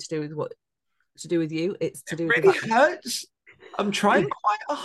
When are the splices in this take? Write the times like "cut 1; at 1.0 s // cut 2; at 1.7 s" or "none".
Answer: none